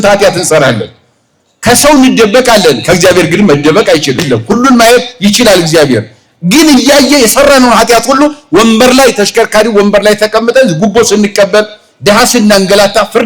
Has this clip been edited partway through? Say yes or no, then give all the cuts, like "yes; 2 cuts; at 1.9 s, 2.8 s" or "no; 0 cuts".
yes; 1 cut; at 4.2 s